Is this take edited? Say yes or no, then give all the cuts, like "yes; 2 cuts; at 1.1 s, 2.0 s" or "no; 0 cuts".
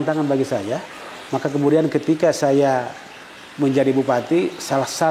no; 0 cuts